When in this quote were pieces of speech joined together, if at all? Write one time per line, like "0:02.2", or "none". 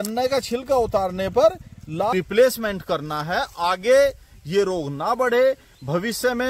0:02.1

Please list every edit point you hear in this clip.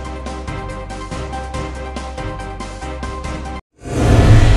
0:01.9
0:03.5

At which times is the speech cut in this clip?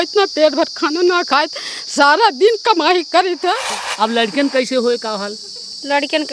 0:03.6

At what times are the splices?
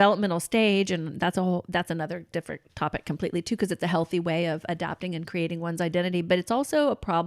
none

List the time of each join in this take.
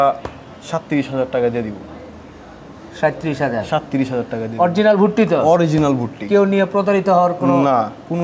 none

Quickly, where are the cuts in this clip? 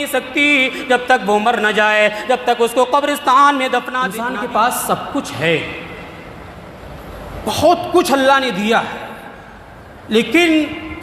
0:04.3

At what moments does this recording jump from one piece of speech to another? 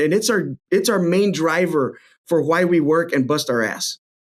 none

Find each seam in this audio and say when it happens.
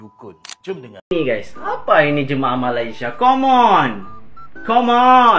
0:00.9

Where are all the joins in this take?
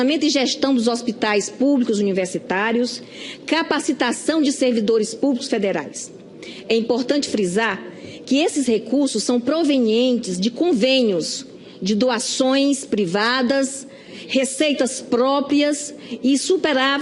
0:01.7

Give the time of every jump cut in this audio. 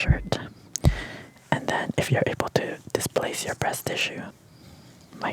0:04.3

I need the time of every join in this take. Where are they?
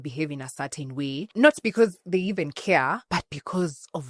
0:01.3
0:03.0

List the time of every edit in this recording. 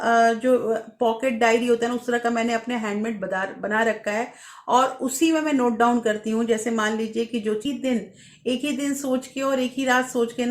0:07.6

